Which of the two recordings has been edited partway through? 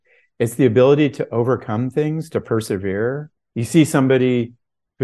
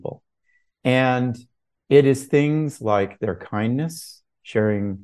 first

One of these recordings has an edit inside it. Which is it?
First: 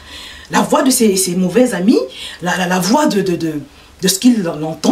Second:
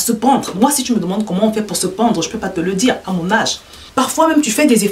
second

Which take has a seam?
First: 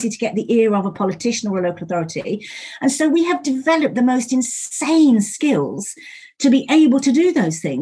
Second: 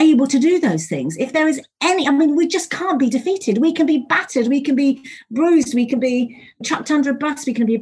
second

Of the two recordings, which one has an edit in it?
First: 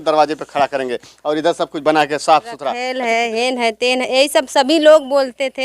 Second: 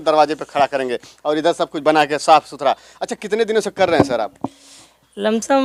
first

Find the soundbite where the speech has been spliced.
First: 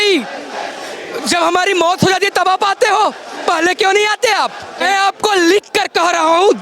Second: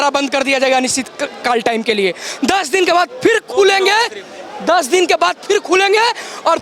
first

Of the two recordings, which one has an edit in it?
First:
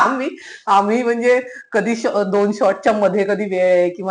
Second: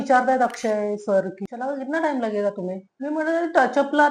second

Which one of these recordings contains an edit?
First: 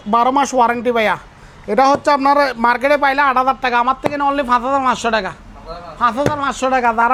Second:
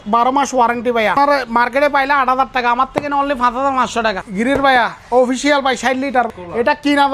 second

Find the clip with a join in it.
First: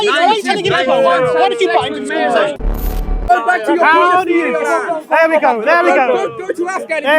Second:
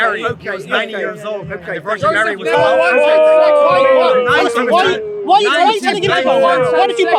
first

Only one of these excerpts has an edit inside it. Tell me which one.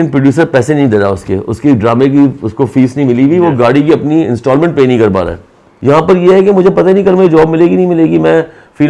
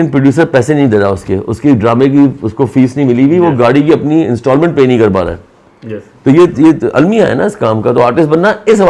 first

